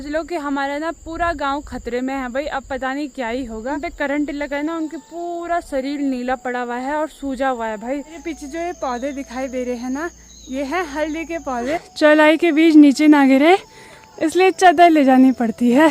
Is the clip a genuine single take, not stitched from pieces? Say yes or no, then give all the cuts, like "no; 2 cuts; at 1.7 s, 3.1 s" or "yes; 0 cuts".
no; 3 cuts; at 3.8 s, 8.1 s, 11.8 s